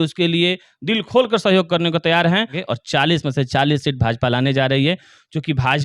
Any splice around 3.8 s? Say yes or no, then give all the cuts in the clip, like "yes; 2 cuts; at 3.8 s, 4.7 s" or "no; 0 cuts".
no; 1 cut; at 2.6 s